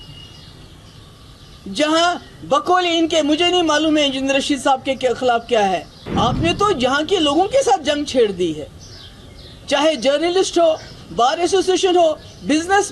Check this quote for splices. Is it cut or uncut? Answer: cut